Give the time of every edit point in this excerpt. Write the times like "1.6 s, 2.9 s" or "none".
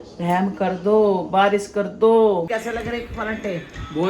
2.5 s